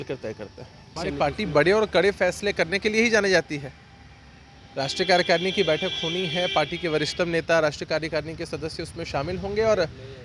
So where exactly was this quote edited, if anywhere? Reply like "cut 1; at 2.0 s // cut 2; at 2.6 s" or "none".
cut 1; at 1.0 s